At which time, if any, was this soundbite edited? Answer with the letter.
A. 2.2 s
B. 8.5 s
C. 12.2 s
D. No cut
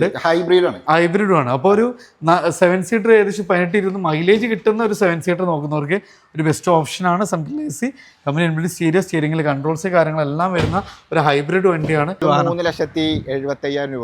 C